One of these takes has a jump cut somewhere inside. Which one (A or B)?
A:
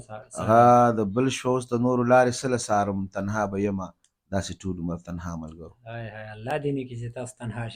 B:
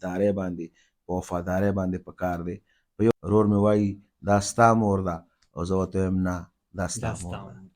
B